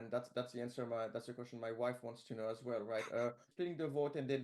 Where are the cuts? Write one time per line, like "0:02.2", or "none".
0:03.5